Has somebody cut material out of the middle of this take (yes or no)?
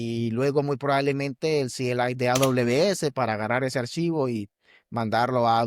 no